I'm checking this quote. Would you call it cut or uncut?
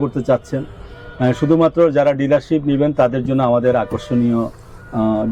uncut